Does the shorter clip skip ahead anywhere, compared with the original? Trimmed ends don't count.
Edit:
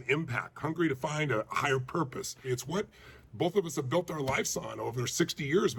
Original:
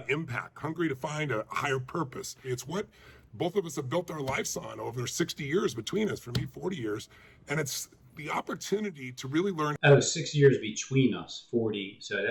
no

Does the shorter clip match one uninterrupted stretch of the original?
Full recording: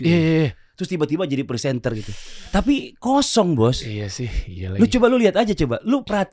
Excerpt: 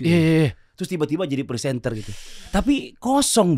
yes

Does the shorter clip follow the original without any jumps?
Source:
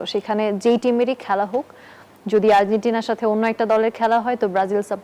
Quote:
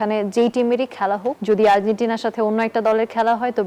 no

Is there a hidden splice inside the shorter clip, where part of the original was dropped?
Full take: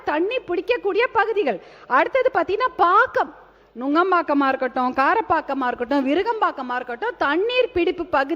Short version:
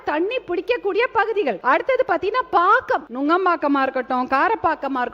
yes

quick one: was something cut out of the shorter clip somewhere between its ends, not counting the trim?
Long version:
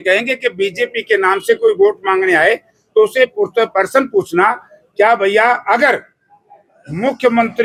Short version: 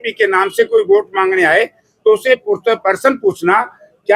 no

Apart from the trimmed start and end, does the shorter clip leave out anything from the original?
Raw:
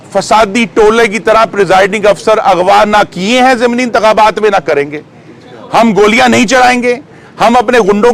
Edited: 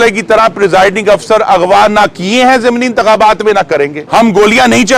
yes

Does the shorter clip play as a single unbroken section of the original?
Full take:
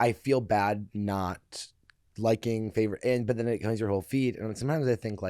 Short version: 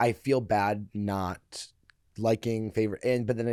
yes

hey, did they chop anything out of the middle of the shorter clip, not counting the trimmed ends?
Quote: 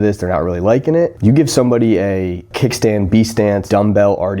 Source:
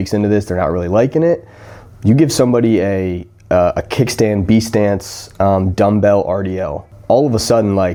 yes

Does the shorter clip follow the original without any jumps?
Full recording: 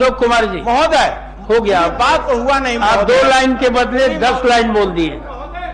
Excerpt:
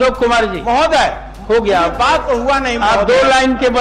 yes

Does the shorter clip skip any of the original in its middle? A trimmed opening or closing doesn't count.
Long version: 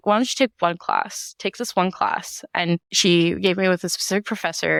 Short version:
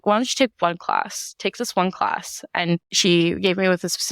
no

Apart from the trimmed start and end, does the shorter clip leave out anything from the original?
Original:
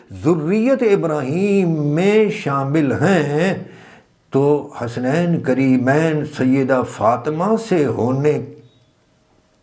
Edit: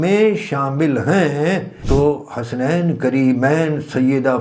yes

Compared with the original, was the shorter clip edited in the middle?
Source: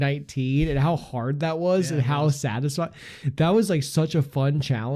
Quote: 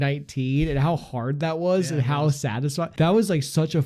yes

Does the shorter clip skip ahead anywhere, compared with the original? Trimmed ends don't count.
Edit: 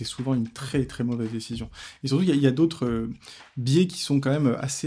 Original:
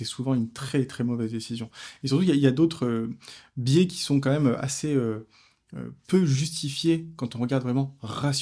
no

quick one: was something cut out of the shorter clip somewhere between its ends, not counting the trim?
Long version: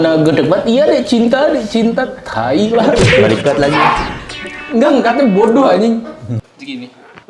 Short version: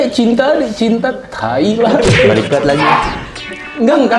no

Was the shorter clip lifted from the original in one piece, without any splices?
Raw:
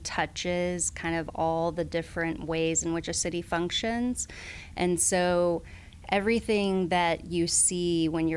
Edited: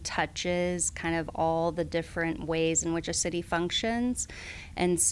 yes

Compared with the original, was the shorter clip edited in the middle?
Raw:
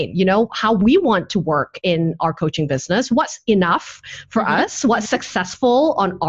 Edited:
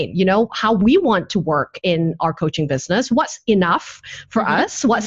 no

